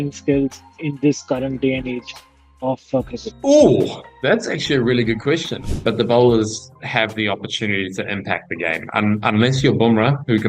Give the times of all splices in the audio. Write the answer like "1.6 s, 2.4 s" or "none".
5.6 s